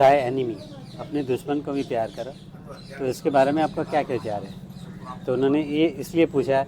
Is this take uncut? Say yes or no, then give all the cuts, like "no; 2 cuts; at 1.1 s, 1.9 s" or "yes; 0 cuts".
yes; 0 cuts